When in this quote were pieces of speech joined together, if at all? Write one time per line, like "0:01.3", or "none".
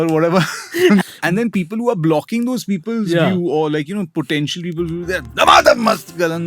0:01.0